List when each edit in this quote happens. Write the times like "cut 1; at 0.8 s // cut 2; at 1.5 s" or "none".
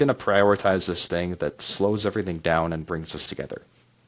none